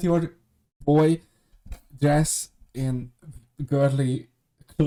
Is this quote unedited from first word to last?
yes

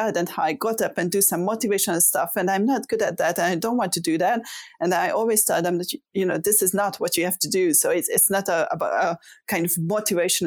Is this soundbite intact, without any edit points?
yes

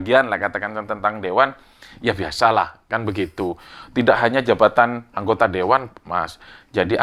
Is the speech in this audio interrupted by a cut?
no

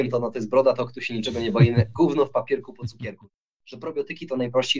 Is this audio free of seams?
no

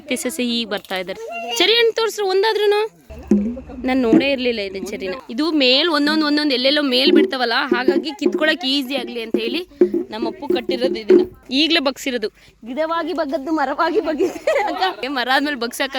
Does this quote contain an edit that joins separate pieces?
yes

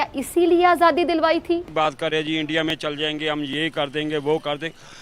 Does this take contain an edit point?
yes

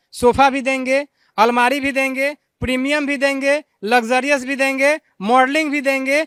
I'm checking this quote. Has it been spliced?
no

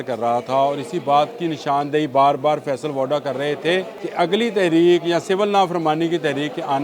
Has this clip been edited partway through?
yes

